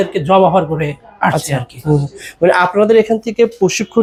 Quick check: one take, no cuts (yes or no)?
yes